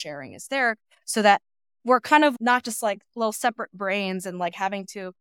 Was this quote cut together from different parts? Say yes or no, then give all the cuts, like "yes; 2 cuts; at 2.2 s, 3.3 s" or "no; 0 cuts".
no; 0 cuts